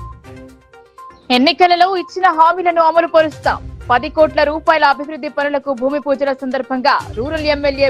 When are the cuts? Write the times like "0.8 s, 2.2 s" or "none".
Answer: none

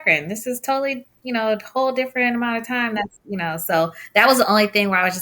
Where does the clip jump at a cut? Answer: none

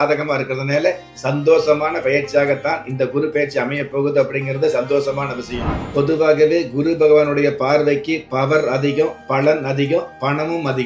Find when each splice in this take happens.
5.8 s

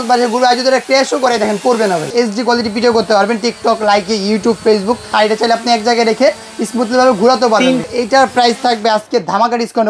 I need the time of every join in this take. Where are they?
2.1 s, 5.1 s, 7.9 s

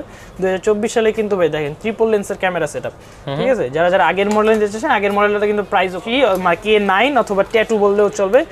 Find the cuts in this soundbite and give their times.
6.0 s

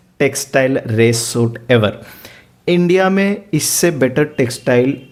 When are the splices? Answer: none

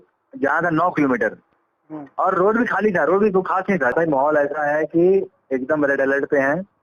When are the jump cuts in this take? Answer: 3.9 s

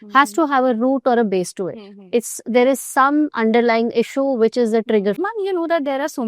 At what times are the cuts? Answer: 5.2 s

